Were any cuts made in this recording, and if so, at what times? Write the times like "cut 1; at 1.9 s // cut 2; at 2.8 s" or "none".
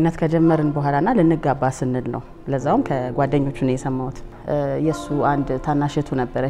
cut 1; at 4.3 s